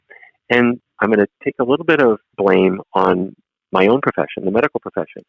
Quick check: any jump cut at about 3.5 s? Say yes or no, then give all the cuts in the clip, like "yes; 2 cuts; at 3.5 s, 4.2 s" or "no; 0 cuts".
no; 2 cuts; at 1.0 s, 2.3 s